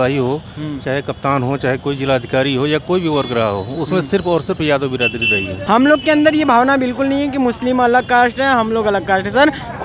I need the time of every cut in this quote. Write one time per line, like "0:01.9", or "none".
0:05.5